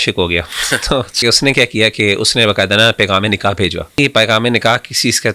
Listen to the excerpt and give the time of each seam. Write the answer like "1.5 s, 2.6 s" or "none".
1.2 s, 3.9 s